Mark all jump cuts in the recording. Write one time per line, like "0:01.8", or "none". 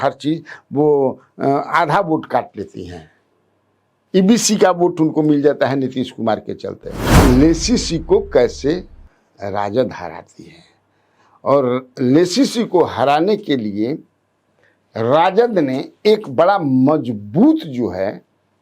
0:07.0